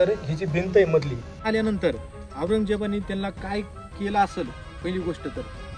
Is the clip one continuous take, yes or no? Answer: no